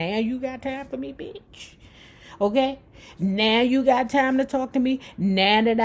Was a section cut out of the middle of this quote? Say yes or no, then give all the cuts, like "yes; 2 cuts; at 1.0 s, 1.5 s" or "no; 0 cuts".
no; 0 cuts